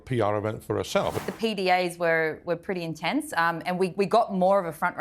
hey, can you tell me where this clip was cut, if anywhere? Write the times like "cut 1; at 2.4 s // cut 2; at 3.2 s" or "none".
cut 1; at 1.2 s